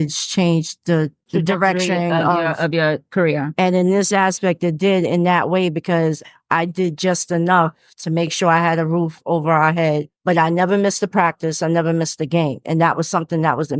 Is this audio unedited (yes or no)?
yes